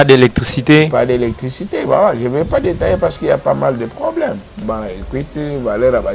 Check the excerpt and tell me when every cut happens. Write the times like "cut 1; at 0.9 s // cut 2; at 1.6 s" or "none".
cut 1; at 4.6 s